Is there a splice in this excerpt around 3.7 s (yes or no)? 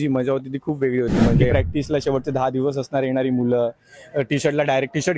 no